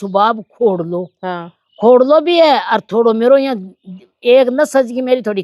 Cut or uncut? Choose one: uncut